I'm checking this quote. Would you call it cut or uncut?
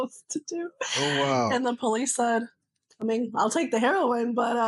uncut